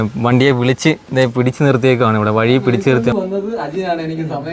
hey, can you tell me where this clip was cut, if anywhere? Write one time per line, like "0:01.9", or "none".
0:03.0